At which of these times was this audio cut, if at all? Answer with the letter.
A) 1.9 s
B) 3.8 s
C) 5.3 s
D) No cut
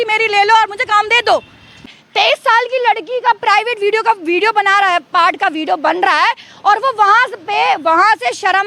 A